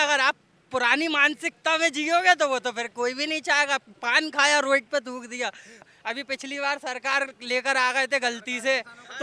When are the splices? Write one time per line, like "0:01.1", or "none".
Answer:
0:05.9